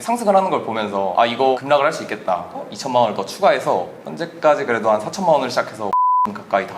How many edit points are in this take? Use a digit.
2